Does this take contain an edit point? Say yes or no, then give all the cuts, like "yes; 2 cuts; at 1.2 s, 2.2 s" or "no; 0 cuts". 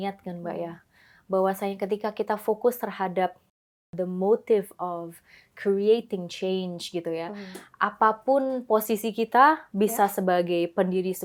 no; 0 cuts